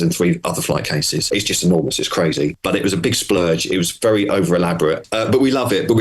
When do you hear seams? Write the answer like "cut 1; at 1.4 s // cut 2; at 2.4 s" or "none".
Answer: cut 1; at 1.2 s // cut 2; at 2.6 s // cut 3; at 5.1 s